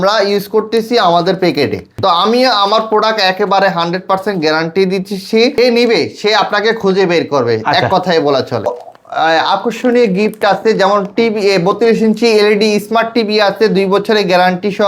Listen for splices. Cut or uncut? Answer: cut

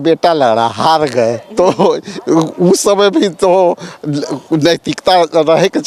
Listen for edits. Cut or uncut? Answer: uncut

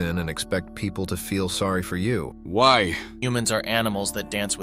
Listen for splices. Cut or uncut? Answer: cut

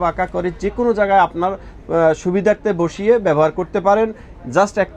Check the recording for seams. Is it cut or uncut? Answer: uncut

